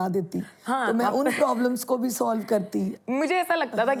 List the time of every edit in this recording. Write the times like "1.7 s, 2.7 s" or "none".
none